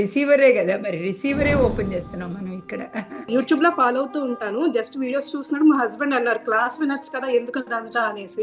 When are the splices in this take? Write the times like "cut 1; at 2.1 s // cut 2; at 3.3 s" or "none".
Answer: cut 1; at 3.3 s